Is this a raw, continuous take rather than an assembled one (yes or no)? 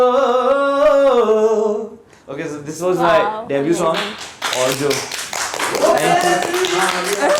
yes